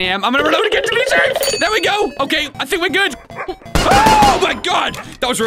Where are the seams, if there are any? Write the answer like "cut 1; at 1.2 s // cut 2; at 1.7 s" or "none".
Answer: cut 1; at 1.5 s // cut 2; at 3.1 s